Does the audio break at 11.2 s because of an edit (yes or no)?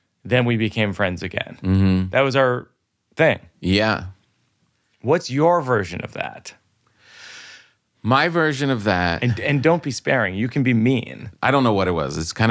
yes